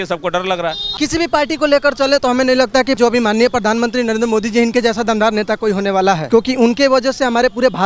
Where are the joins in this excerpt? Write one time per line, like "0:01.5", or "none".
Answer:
0:00.9
0:03.0
0:06.2